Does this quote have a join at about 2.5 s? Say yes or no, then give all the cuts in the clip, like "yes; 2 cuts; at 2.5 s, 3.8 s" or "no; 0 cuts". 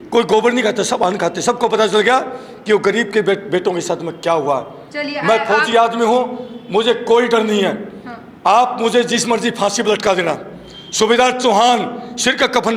no; 0 cuts